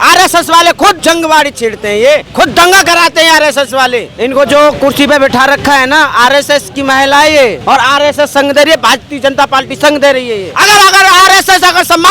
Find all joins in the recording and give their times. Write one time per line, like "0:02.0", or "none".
0:01.0
0:02.3
0:04.1
0:07.6
0:10.5